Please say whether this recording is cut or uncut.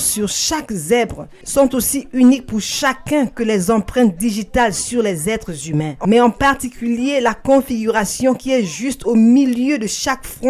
cut